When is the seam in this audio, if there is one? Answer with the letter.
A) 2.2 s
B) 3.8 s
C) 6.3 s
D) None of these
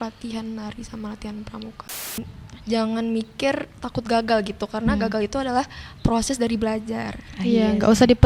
A